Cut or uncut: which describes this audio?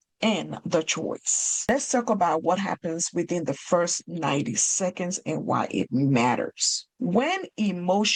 uncut